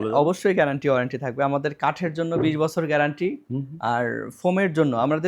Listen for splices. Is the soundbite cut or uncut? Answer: uncut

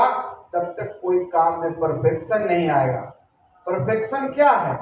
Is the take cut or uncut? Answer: uncut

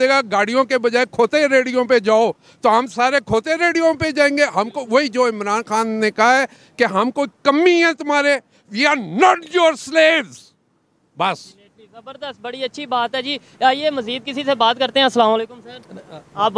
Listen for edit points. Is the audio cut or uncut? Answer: uncut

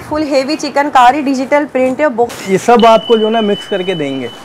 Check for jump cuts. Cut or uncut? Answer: cut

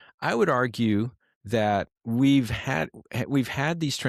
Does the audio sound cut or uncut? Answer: uncut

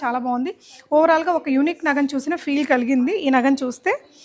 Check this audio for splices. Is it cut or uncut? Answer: uncut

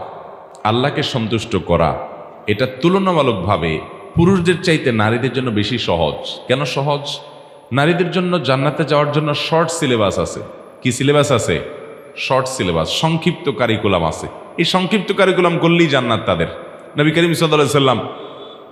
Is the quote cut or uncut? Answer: uncut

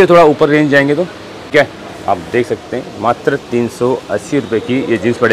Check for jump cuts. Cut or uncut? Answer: cut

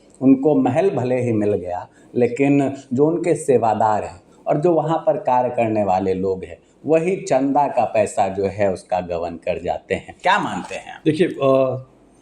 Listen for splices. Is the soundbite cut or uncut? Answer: cut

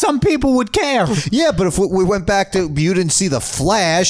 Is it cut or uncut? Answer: uncut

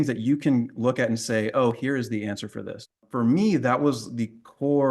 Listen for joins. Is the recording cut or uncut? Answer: cut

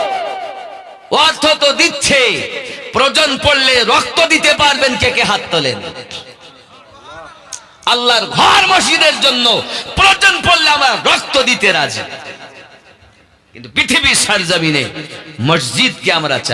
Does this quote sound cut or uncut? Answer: uncut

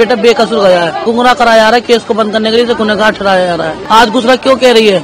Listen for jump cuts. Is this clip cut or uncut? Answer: cut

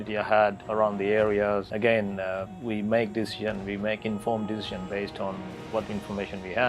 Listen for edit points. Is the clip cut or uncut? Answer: cut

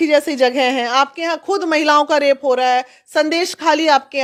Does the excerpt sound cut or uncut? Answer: uncut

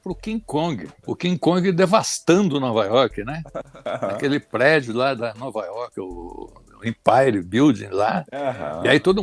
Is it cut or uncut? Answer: uncut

